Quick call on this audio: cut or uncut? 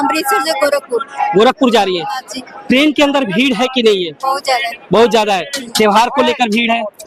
uncut